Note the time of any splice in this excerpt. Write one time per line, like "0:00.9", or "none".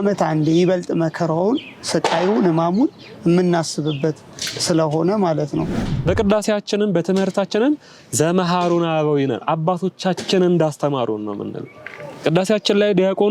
0:05.8